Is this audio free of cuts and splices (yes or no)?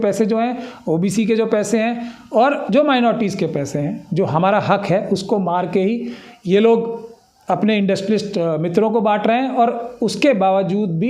yes